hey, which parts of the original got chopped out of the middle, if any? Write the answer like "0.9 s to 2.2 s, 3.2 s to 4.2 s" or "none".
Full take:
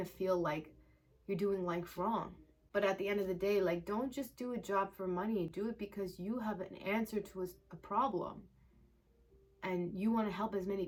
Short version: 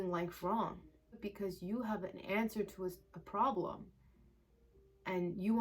2.7 s to 5.7 s